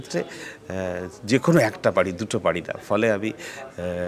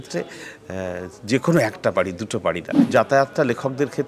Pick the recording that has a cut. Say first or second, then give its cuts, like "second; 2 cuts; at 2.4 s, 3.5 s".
second; 1 cut; at 2.7 s